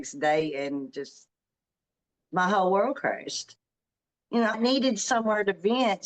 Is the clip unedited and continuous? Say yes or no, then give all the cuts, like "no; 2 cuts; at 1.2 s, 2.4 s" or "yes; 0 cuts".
no; 1 cut; at 4.5 s